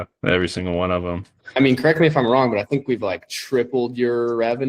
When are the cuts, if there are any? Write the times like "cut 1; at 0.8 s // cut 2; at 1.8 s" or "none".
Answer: cut 1; at 1.4 s